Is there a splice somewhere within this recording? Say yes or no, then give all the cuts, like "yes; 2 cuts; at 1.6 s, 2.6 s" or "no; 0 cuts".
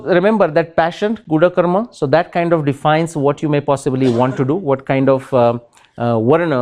no; 0 cuts